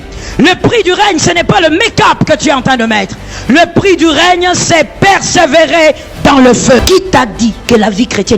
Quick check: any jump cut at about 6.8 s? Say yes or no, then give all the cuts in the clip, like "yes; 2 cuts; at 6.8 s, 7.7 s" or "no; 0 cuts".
yes; 1 cut; at 6.8 s